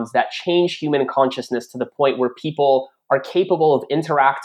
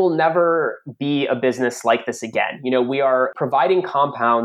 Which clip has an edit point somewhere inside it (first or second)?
second